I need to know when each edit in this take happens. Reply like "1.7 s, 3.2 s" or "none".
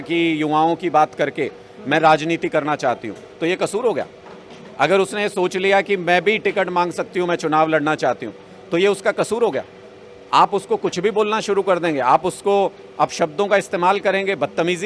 none